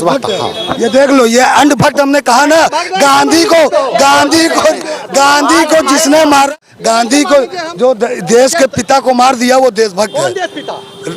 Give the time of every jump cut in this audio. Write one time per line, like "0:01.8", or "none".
0:06.5